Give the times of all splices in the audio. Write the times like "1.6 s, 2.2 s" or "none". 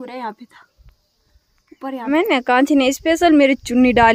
2.1 s

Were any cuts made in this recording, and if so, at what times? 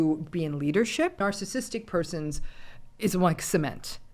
1.2 s

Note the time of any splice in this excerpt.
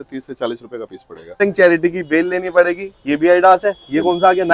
1.4 s

